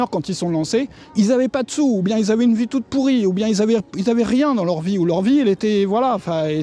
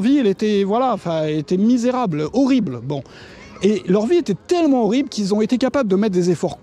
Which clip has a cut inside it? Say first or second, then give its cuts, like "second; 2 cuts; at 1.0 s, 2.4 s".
first; 1 cut; at 1.0 s